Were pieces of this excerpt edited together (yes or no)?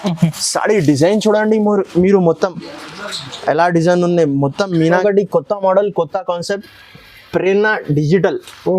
yes